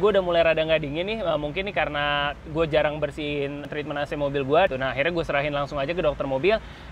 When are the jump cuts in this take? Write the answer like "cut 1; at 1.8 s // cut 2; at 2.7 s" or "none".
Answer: cut 1; at 3.6 s // cut 2; at 4.7 s